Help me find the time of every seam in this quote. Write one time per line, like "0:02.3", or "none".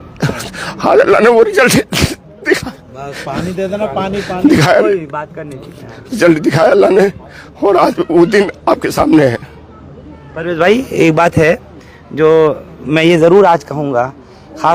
none

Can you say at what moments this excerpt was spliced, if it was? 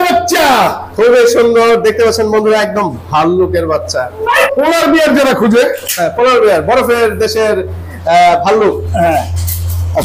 0:04.4

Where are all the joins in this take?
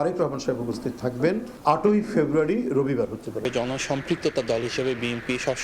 0:03.4

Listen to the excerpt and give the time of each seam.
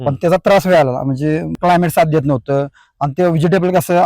0:01.5

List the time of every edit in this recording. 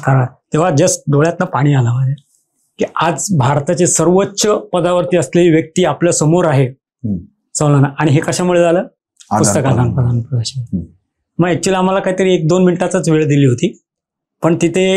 none

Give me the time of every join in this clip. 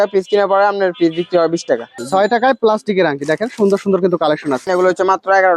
0:01.9
0:04.6

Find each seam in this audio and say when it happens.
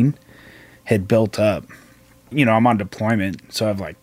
0:02.3

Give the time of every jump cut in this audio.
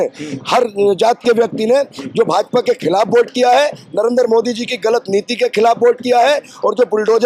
none

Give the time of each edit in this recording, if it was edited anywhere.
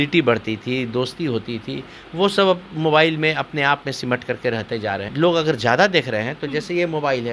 0:05.1

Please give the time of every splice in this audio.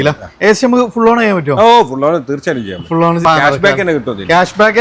0:03.2

